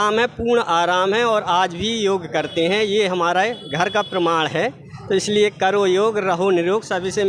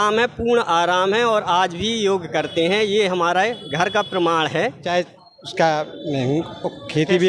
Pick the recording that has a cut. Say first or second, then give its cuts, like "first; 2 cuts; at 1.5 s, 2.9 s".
second; 1 cut; at 4.8 s